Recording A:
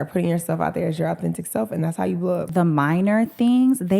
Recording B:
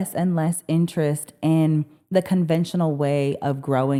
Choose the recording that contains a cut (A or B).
A